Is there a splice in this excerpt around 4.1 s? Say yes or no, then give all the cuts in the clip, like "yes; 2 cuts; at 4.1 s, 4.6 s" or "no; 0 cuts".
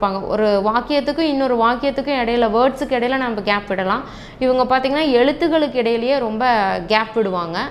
no; 0 cuts